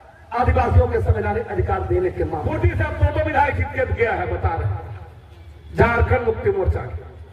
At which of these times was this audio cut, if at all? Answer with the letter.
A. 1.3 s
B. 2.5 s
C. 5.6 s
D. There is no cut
B